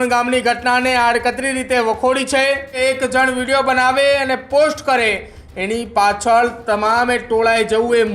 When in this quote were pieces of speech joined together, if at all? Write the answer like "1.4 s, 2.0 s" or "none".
2.8 s